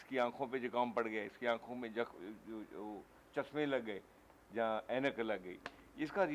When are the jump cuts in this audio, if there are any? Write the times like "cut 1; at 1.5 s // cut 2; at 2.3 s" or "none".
none